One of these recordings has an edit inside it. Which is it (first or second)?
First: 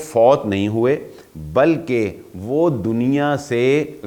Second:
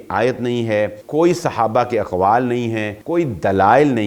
second